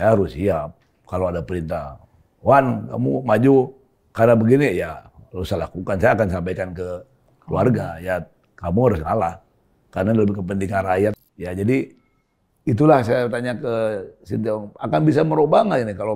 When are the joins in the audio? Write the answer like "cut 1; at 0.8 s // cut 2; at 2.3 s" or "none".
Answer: cut 1; at 11.2 s